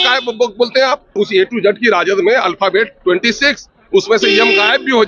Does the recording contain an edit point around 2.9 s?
no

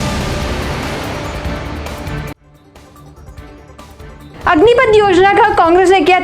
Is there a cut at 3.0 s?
no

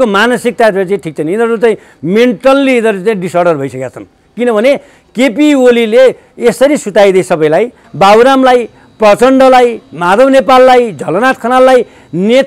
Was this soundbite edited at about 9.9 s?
no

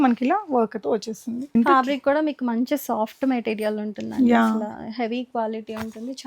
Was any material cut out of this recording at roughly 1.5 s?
yes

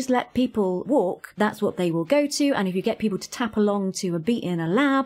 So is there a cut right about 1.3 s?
yes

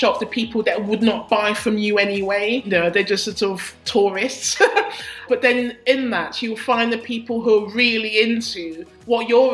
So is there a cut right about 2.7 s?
yes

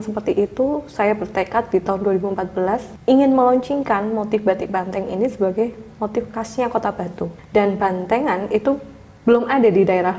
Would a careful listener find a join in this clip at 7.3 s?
yes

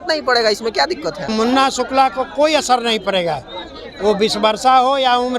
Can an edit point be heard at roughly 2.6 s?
no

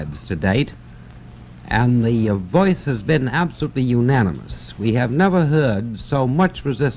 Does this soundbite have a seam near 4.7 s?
no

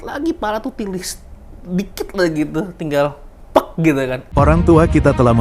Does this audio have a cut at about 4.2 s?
yes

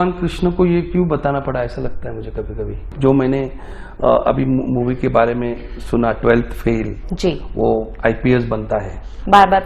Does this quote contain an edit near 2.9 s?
yes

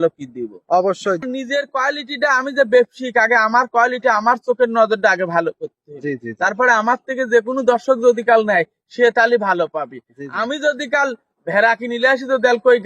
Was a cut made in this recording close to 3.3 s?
no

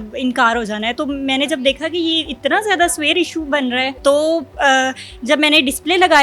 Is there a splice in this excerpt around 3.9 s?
yes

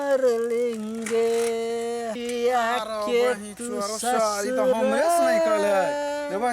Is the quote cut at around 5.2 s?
no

